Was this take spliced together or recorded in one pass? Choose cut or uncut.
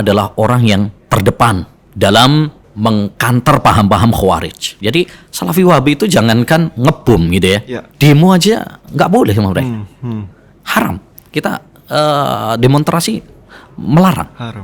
cut